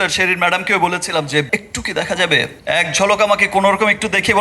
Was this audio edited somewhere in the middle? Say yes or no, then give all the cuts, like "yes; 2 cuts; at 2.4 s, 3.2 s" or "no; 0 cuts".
yes; 2 cuts; at 1.5 s, 2.6 s